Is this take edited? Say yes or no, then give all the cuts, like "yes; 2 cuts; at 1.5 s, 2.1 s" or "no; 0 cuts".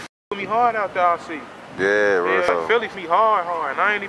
yes; 1 cut; at 2.6 s